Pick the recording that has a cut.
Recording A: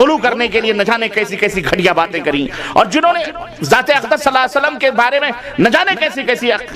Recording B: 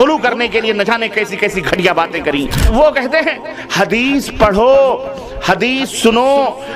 B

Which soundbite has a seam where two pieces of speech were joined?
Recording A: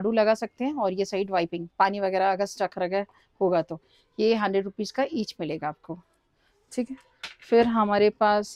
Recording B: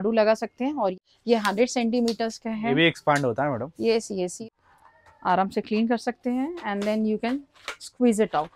B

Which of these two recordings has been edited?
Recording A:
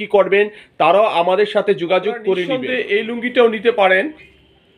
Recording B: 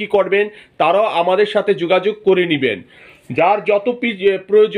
A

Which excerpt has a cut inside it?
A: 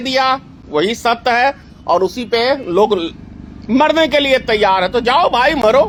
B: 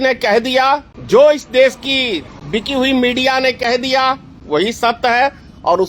B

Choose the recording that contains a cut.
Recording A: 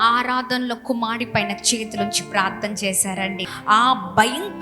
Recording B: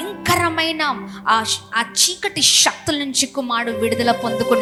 A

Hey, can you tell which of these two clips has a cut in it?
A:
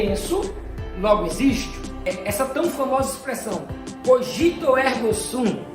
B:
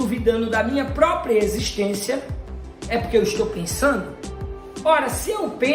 A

